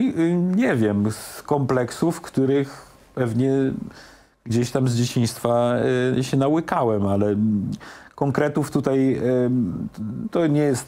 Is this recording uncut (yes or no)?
yes